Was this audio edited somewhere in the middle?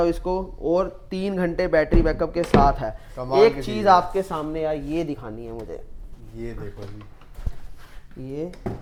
no; 0 cuts

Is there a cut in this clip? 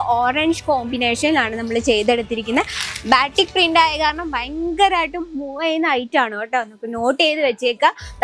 no; 0 cuts

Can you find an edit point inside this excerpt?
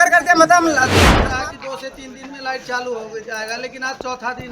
yes; 1 cut; at 1.1 s

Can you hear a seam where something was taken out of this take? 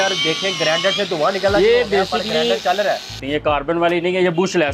yes; 1 cut; at 3.2 s

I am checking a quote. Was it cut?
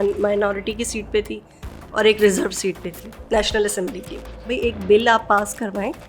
yes; 1 cut; at 4.5 s

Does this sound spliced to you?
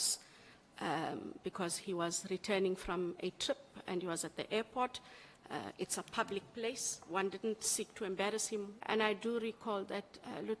yes; 1 cut; at 8.8 s

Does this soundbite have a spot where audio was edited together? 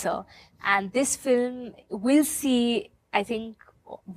no; 0 cuts

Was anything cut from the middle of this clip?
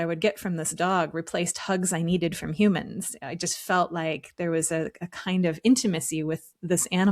no; 0 cuts

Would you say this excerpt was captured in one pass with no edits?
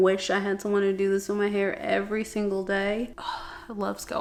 yes; 0 cuts

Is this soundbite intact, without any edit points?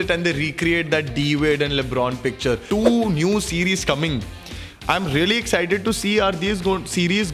no; 1 cut; at 2.6 s

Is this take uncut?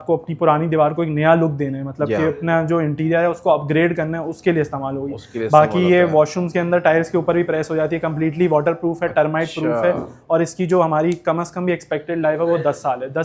yes; 0 cuts

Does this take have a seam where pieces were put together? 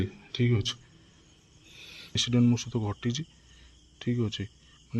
yes; 1 cut; at 2.2 s

